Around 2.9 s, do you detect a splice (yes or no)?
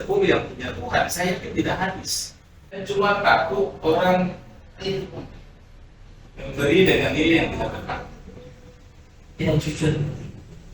yes